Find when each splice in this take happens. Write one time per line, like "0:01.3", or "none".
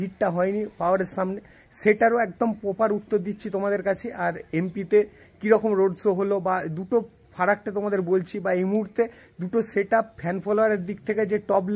none